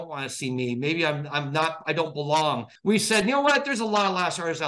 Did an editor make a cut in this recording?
yes; 1 cut; at 2.7 s

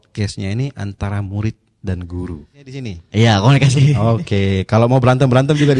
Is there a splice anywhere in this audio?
yes; 1 cut; at 3.0 s

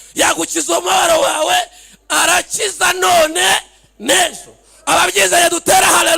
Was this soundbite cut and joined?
no; 0 cuts

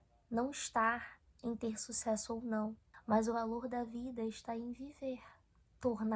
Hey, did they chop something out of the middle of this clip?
no; 0 cuts

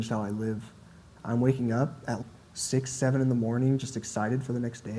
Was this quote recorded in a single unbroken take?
no; 1 cut; at 1.1 s

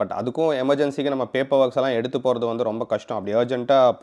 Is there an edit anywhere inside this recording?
no; 0 cuts

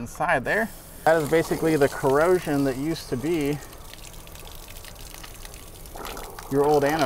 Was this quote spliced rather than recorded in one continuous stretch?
yes; 1 cut; at 1.1 s

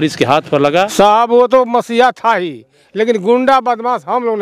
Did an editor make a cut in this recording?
yes; 1 cut; at 0.9 s

